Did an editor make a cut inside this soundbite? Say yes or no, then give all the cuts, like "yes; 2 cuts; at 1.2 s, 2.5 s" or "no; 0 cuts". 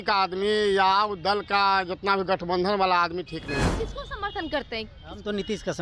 yes; 1 cut; at 3.7 s